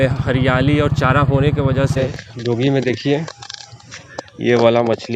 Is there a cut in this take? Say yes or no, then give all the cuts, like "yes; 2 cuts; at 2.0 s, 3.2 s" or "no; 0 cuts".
yes; 1 cut; at 2.0 s